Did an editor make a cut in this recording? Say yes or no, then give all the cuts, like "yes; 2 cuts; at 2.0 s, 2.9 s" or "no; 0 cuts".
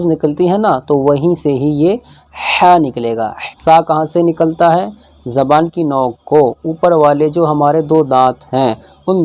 yes; 1 cut; at 3.4 s